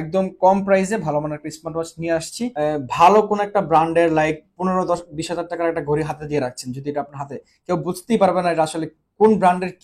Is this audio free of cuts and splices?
no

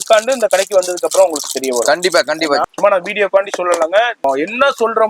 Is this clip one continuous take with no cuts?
no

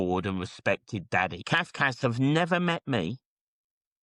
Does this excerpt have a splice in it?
yes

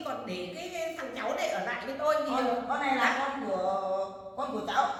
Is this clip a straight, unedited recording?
yes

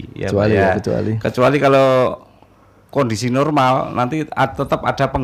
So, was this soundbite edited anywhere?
no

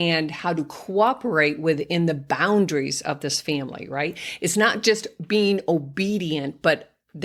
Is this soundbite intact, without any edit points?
yes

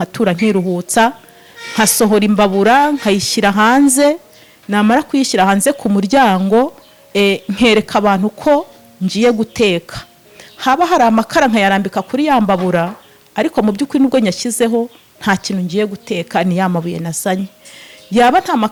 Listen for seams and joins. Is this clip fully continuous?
yes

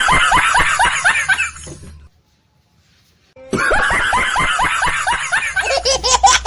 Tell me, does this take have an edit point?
yes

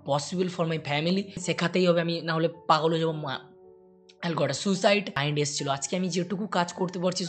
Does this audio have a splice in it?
yes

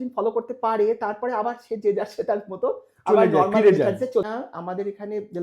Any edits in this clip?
yes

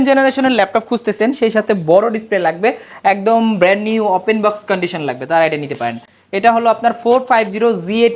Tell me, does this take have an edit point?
no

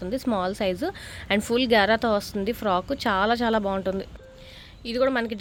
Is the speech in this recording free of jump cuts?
yes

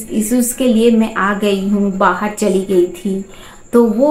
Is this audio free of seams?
yes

